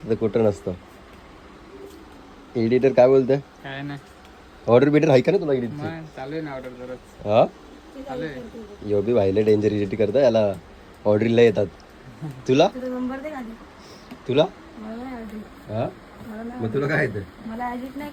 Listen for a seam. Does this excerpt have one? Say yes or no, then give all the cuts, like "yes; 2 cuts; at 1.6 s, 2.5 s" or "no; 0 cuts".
no; 0 cuts